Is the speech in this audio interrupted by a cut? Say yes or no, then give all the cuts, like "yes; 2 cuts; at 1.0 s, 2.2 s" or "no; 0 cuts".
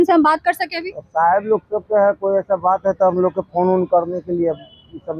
no; 0 cuts